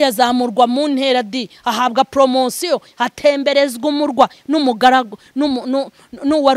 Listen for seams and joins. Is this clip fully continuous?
yes; 0 cuts

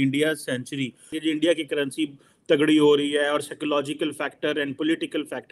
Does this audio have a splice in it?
yes; 1 cut; at 1.2 s

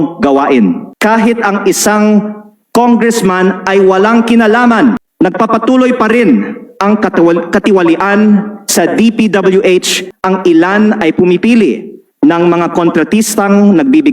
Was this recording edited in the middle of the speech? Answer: yes; 3 cuts; at 0.9 s, 5.1 s, 10.1 s

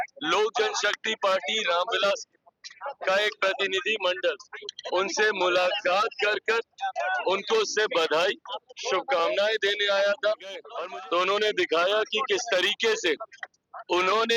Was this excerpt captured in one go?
no; 1 cut; at 10.7 s

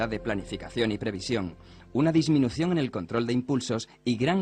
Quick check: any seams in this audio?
no; 0 cuts

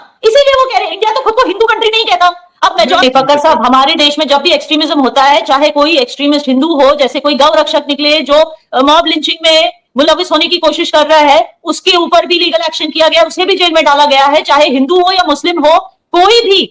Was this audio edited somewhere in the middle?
yes; 1 cut; at 3.0 s

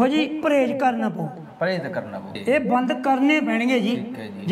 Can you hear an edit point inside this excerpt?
yes; 1 cut; at 2.3 s

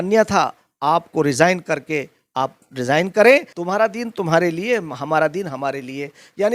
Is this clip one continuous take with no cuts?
no; 1 cut; at 3.5 s

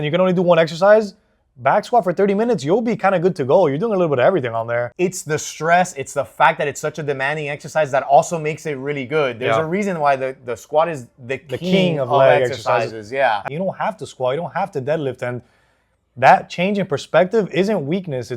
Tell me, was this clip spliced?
yes; 2 cuts; at 4.9 s, 13.4 s

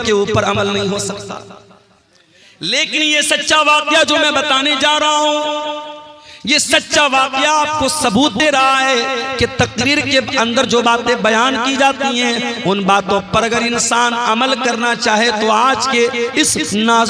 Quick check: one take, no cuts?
yes; 0 cuts

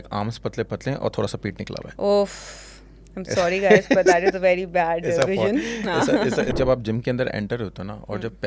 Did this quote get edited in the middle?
yes; 1 cut; at 6.5 s

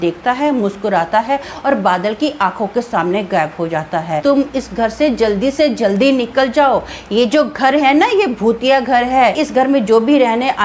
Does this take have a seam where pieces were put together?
yes; 2 cuts; at 4.2 s, 9.4 s

